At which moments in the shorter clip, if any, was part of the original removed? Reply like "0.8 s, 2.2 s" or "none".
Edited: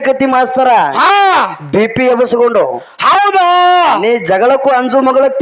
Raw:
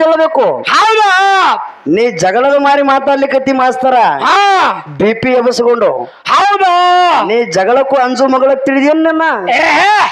none